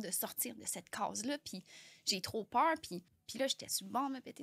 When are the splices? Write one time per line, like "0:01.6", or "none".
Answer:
0:03.2